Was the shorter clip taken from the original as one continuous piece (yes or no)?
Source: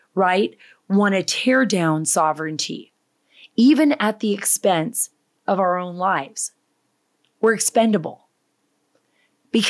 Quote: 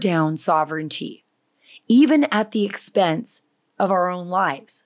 yes